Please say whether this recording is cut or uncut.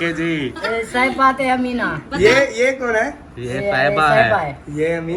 uncut